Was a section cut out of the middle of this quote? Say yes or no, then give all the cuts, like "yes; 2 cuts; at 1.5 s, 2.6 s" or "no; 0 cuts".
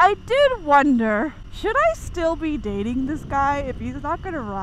yes; 1 cut; at 1.4 s